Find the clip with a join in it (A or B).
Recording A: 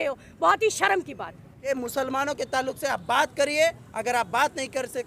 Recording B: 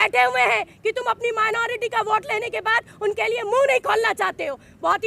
A